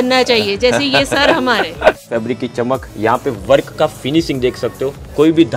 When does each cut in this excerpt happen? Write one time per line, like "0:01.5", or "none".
0:02.1